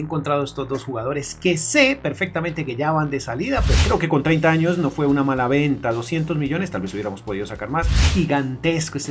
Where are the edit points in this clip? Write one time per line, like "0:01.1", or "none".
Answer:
0:03.8
0:08.0